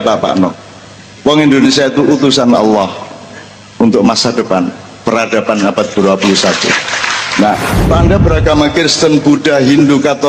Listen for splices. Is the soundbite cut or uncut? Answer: cut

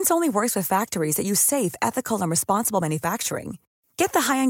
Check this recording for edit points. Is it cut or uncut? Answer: uncut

